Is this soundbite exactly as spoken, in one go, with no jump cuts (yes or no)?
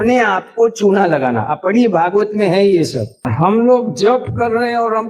no